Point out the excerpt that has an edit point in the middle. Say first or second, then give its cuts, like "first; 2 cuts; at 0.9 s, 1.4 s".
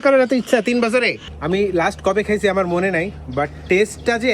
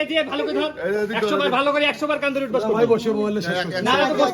first; 1 cut; at 1.3 s